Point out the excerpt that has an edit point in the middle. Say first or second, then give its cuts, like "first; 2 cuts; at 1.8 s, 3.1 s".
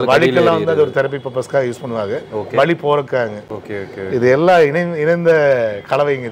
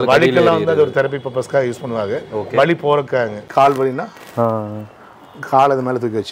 second; 1 cut; at 3.4 s